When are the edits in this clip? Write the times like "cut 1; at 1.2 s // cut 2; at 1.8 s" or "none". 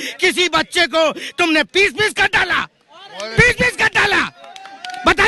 none